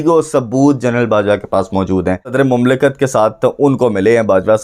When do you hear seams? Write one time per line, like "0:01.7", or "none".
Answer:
0:02.3